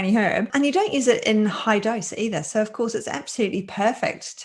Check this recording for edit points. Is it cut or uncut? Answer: uncut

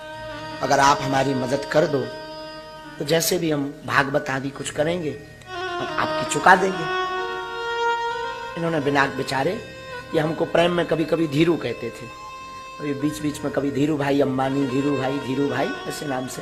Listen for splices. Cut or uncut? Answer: uncut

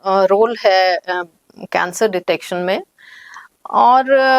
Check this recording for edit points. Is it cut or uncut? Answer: uncut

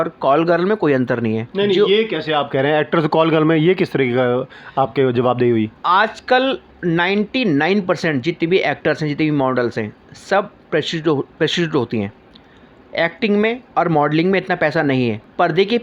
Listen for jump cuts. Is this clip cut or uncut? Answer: uncut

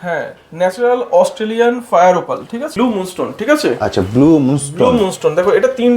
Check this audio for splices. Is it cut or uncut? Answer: cut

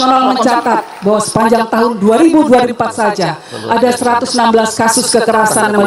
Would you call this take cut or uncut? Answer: uncut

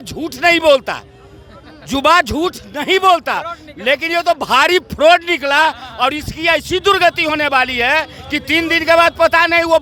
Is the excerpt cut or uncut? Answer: uncut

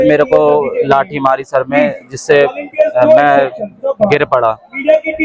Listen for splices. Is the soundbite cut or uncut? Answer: uncut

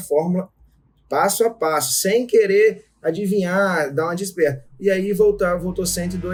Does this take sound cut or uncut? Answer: uncut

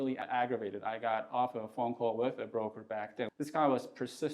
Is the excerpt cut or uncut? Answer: cut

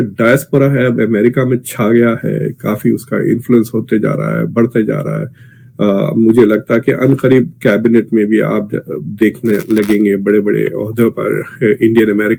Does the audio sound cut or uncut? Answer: uncut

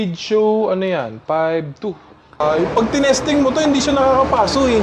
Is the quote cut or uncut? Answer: cut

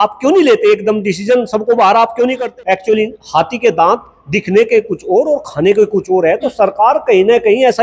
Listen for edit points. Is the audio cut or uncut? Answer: cut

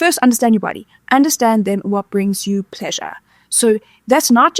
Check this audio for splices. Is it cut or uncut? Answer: uncut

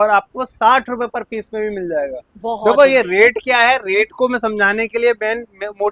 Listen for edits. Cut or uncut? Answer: uncut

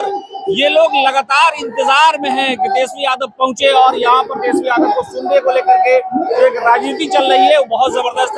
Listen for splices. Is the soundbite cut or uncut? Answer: uncut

